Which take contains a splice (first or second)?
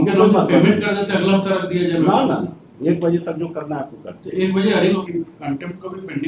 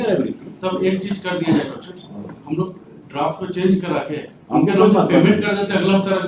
first